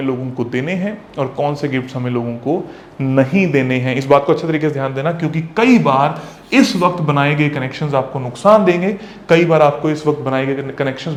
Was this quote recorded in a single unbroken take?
yes; 0 cuts

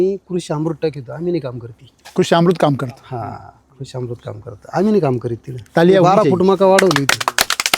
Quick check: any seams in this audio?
no; 0 cuts

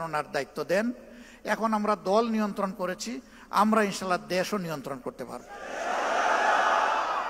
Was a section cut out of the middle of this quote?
no; 0 cuts

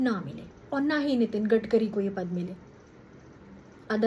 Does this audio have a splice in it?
no; 0 cuts

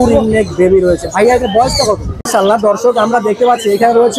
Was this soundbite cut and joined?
yes; 1 cut; at 2.1 s

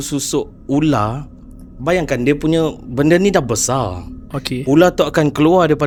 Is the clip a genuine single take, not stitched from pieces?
yes; 0 cuts

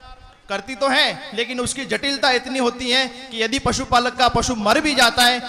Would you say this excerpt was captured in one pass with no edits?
yes; 0 cuts

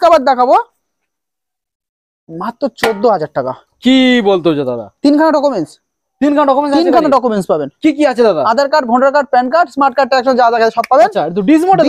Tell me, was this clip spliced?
no; 0 cuts

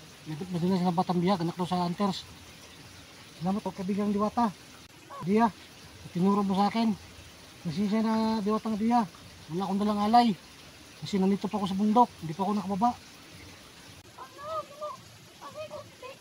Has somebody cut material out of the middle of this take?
yes; 1 cut; at 3.7 s

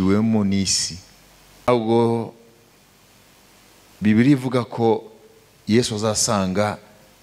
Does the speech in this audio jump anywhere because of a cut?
yes; 1 cut; at 1.7 s

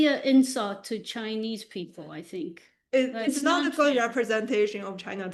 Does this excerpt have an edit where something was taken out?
no; 0 cuts

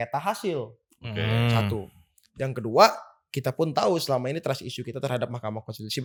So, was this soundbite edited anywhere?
no; 0 cuts

